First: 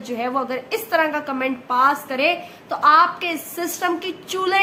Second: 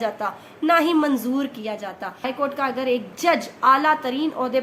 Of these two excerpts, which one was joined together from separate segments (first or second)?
second